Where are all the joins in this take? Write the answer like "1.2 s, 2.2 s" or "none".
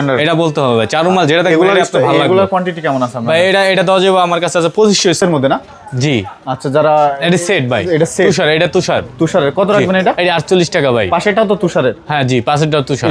5.2 s